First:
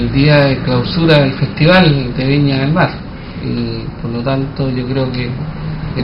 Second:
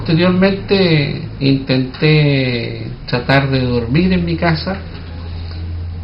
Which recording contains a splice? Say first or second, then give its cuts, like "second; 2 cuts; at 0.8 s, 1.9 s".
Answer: first; 1 cut; at 3.6 s